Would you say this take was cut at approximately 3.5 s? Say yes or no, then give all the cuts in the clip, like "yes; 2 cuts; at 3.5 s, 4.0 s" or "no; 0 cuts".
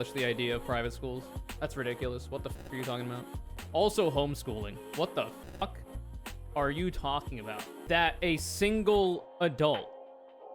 yes; 2 cuts; at 3.5 s, 7.7 s